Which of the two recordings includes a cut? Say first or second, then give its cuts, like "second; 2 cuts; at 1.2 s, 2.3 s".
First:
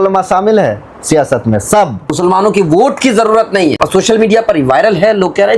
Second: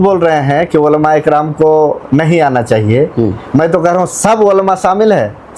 first; 2 cuts; at 2.0 s, 3.8 s